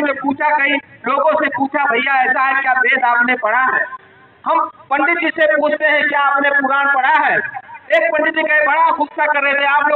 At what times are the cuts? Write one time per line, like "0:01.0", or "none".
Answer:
none